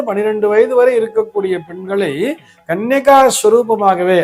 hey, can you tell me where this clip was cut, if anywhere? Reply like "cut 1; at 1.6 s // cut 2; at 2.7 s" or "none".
none